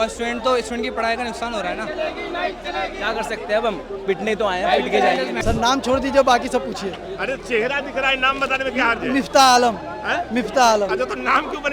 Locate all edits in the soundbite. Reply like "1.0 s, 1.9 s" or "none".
5.4 s

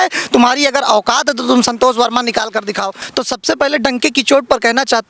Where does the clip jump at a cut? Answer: 3.0 s

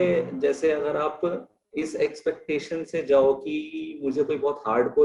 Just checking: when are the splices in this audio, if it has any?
none

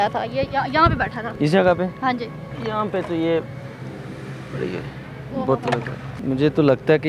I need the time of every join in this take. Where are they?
1.2 s, 2.5 s, 6.1 s

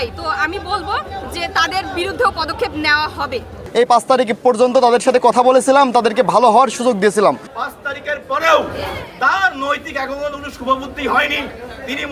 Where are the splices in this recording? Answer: 3.6 s, 7.5 s

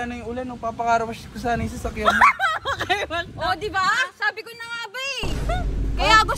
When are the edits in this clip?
5.3 s

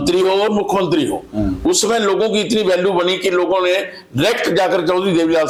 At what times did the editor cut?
none

